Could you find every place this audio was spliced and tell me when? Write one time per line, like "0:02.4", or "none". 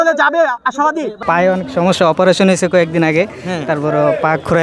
0:01.2

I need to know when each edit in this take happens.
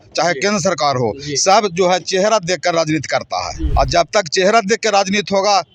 0:03.6

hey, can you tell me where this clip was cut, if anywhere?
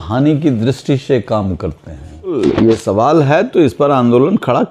0:02.4

